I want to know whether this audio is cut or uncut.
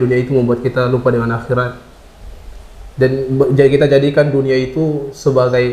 uncut